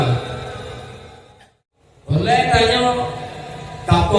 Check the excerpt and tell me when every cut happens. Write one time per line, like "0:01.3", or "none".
0:01.2